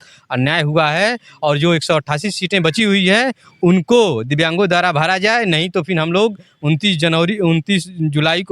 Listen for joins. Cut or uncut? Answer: uncut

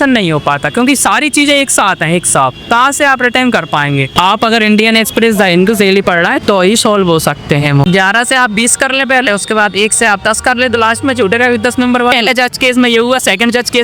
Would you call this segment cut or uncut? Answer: cut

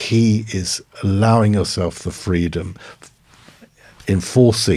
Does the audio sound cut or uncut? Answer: uncut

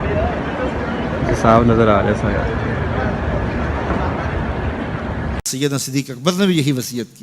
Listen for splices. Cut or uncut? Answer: cut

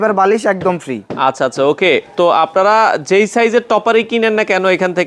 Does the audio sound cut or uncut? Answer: uncut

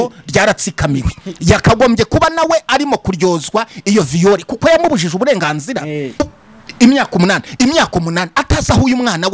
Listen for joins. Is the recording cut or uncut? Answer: cut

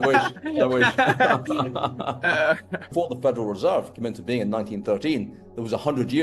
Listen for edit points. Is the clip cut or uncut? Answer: cut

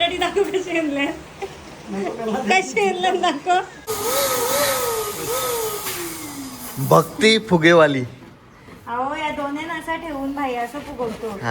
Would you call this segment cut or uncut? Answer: cut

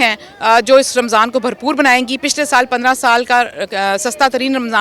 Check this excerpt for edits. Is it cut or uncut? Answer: uncut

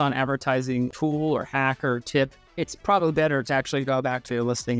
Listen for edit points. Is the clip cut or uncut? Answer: cut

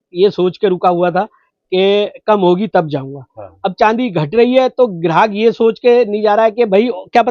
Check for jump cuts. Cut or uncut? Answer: uncut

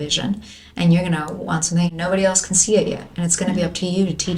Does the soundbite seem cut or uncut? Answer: uncut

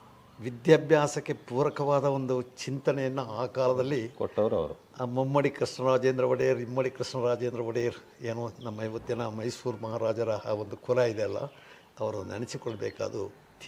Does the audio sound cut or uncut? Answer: uncut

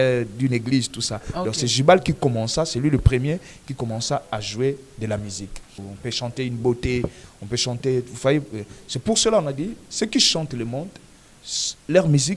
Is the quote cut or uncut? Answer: cut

